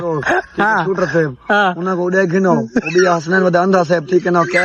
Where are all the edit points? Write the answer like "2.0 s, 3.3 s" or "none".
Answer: none